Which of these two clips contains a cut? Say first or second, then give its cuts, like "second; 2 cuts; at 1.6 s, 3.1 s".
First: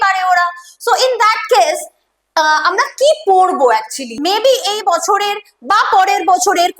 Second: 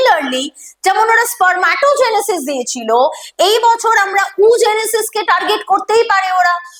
first; 1 cut; at 4.1 s